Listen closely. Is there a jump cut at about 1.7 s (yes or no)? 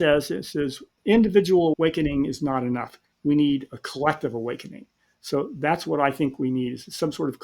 yes